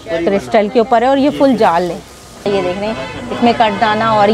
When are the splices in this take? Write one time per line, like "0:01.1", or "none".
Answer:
0:02.5